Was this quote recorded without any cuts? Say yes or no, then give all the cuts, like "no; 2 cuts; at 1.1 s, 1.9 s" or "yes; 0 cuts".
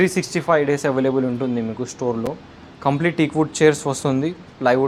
yes; 0 cuts